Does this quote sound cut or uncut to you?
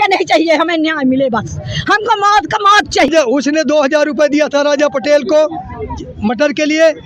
cut